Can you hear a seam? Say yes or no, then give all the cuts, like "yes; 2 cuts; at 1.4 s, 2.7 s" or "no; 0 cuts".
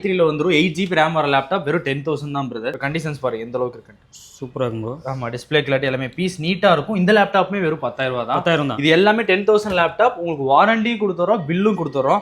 yes; 1 cut; at 2.8 s